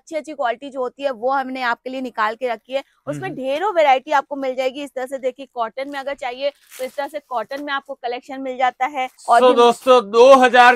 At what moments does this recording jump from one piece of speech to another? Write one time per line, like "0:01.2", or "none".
0:09.2